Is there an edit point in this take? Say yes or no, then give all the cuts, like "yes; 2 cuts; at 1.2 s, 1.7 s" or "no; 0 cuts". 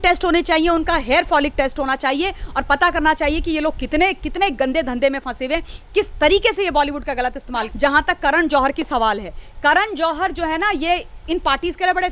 yes; 1 cut; at 7.6 s